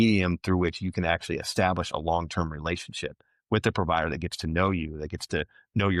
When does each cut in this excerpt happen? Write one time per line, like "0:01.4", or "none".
none